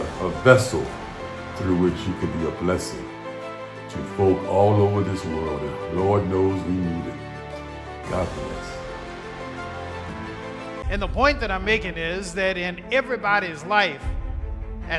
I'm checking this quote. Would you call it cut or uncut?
cut